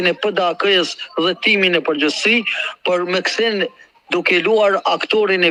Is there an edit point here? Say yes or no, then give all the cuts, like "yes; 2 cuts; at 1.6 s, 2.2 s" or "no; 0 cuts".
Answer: no; 0 cuts